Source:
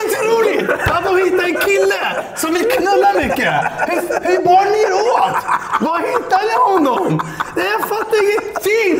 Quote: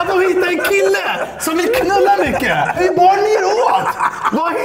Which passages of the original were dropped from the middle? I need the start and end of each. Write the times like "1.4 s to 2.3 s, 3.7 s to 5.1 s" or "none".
3.7 s to 4.2 s